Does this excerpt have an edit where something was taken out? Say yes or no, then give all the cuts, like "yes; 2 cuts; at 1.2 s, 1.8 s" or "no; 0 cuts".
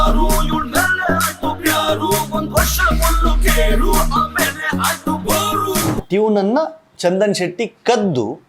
yes; 1 cut; at 6.0 s